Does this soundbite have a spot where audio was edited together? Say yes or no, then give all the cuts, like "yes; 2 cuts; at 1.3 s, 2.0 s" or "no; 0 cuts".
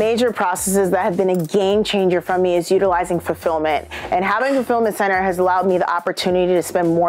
no; 0 cuts